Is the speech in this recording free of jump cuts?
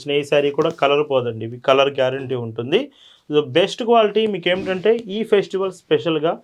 yes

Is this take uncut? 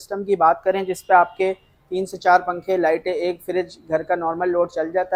yes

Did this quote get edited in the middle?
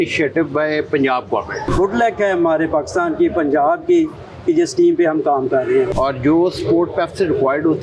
yes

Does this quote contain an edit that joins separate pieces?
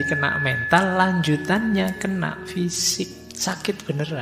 yes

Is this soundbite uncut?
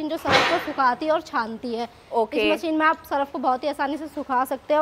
yes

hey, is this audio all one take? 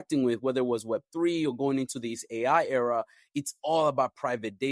yes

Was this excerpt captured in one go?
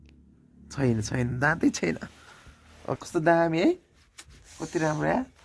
no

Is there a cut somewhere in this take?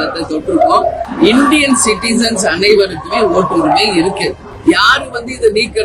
yes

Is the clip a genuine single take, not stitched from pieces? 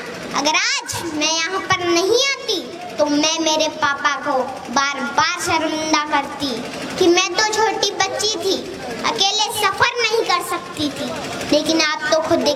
yes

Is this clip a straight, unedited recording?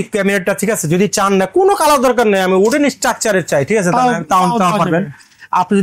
yes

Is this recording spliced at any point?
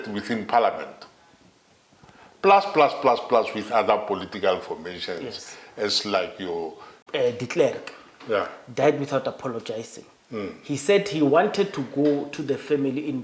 yes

